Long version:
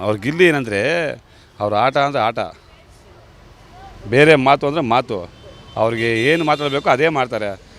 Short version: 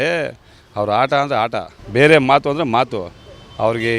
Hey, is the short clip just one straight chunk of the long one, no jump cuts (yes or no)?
no